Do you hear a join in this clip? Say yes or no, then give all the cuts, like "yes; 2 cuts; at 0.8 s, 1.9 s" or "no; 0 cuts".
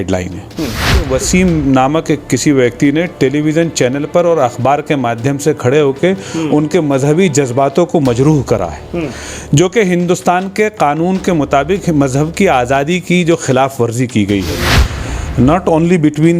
yes; 2 cuts; at 1.0 s, 14.9 s